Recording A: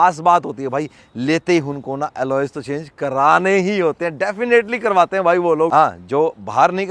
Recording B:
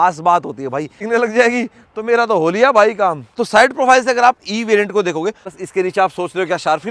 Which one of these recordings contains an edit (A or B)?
B